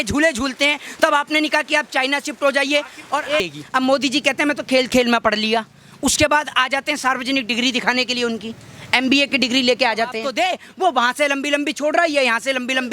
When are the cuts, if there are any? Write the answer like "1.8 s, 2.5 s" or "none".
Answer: 3.3 s, 10.2 s